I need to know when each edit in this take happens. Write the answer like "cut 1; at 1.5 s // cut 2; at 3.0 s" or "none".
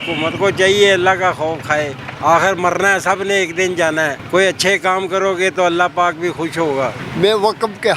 cut 1; at 2.0 s // cut 2; at 4.2 s // cut 3; at 7.0 s